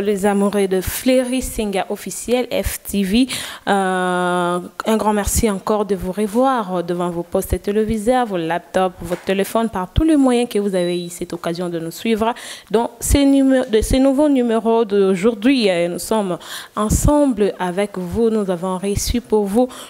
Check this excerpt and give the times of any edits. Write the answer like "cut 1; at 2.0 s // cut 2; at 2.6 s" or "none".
none